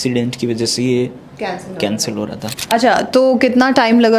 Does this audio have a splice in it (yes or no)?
yes